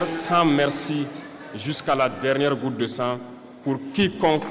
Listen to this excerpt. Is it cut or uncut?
uncut